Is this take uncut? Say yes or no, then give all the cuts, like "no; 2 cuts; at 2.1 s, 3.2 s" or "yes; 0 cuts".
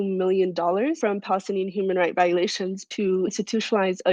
no; 2 cuts; at 1.0 s, 3.1 s